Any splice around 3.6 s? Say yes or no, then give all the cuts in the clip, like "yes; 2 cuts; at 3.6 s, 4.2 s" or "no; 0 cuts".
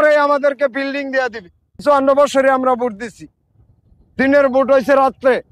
no; 1 cut; at 1.8 s